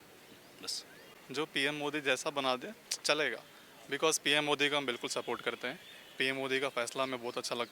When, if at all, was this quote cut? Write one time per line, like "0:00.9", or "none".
0:01.1